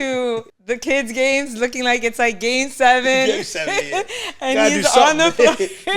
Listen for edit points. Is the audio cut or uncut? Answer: uncut